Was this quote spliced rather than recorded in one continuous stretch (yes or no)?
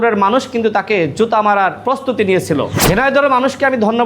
yes